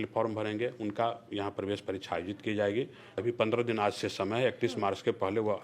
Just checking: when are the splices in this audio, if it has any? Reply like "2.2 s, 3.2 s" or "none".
3.1 s